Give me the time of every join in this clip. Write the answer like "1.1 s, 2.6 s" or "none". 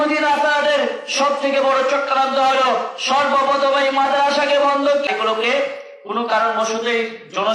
5.1 s